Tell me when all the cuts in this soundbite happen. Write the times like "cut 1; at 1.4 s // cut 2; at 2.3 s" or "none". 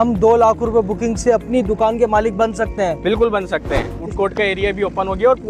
cut 1; at 4.0 s